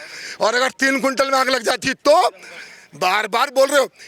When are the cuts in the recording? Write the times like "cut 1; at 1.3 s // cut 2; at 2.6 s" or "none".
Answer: none

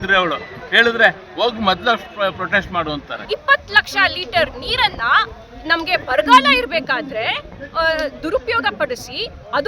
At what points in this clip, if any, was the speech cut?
cut 1; at 3.2 s

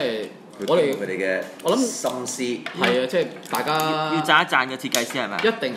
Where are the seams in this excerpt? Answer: none

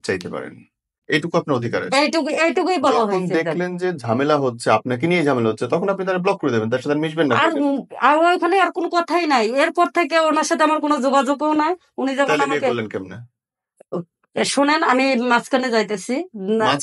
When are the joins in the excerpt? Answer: cut 1; at 1.0 s

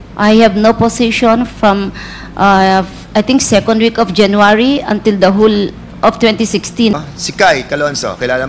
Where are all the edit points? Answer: cut 1; at 6.9 s

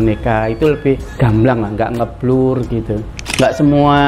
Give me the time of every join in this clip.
cut 1; at 1.2 s // cut 2; at 3.3 s

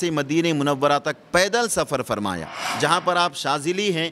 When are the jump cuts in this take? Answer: cut 1; at 2.7 s

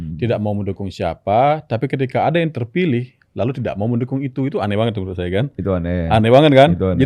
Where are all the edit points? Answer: none

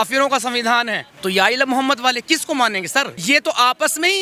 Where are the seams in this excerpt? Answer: cut 1; at 1.0 s // cut 2; at 3.1 s

